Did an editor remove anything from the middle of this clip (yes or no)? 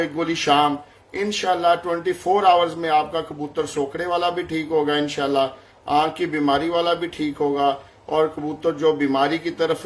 no